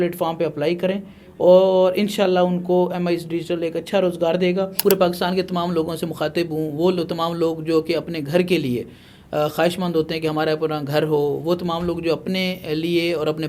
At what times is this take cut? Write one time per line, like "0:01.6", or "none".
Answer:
0:04.8